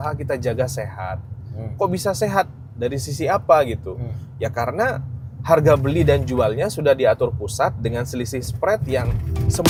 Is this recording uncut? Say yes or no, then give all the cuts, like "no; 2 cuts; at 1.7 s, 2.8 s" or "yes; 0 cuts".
yes; 0 cuts